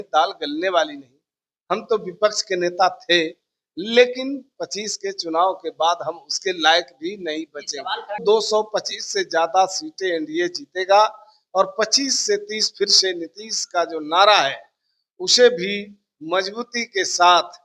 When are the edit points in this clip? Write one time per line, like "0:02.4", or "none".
0:08.2